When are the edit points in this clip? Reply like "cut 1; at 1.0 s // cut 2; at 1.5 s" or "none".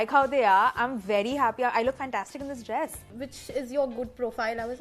cut 1; at 3.1 s